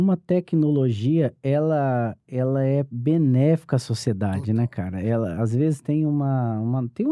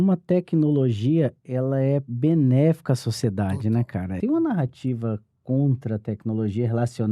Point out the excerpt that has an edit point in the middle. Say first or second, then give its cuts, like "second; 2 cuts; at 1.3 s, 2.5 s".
second; 2 cuts; at 1.4 s, 4.1 s